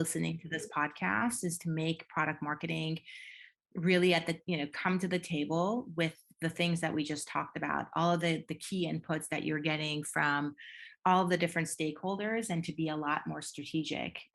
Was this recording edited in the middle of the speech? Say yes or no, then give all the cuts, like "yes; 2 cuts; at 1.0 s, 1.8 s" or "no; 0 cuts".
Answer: no; 0 cuts